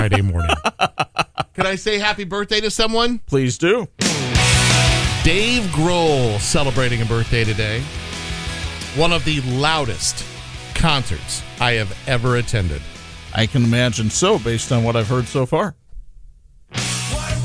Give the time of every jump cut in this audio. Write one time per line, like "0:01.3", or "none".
none